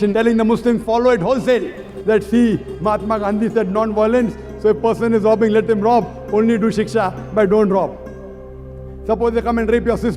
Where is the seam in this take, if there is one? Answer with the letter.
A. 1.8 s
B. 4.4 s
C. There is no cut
A